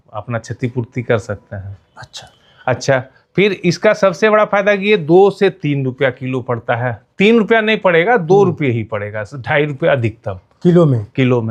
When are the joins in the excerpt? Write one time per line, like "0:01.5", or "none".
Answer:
none